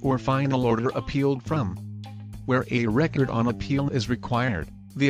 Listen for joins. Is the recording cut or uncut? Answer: cut